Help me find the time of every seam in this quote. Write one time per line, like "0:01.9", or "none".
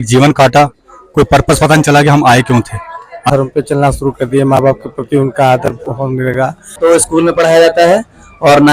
0:03.3
0:06.8